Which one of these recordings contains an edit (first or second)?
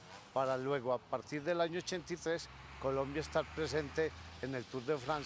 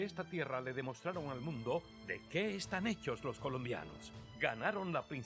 second